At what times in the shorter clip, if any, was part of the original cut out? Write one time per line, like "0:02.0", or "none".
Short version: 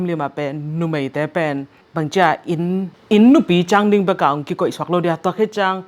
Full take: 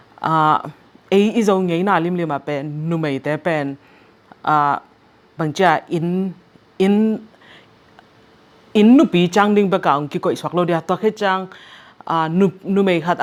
0:01.8
0:03.0